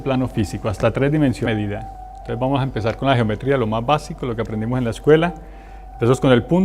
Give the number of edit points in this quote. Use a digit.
0